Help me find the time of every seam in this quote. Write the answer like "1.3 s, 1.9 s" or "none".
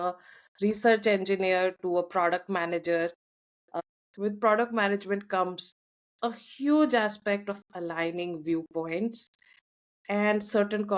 3.7 s